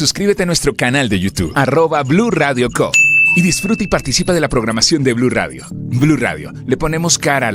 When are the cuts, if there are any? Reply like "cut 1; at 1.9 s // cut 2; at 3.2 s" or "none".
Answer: none